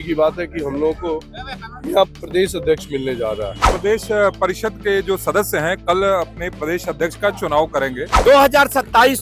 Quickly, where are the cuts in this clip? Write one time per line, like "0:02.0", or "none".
0:03.7
0:08.0